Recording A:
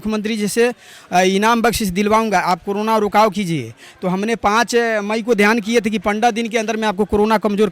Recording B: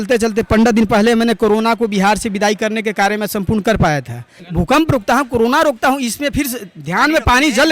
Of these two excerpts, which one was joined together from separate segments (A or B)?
B